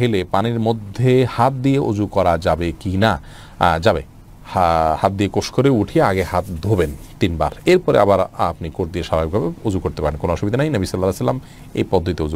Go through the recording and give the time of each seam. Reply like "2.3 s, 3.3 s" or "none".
none